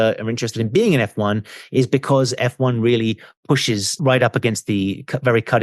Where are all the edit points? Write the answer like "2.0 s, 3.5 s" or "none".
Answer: 3.9 s

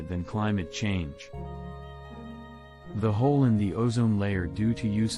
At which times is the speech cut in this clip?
1.1 s, 3.0 s

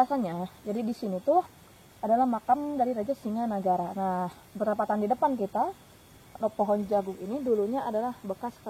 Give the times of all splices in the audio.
none

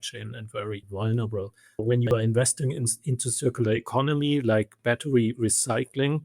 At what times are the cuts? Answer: 0.9 s, 1.8 s

